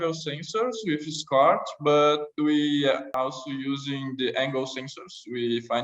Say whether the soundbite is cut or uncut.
cut